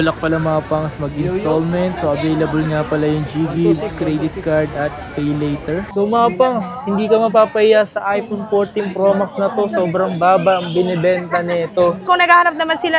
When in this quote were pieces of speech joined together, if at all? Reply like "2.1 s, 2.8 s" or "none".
5.9 s, 12.0 s

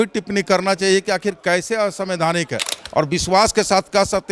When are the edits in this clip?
2.8 s

